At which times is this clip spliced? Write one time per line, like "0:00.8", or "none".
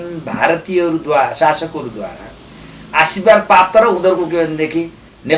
none